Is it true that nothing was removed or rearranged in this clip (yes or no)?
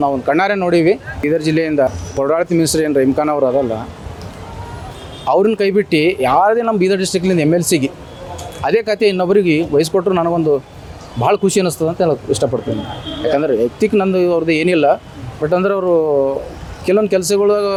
yes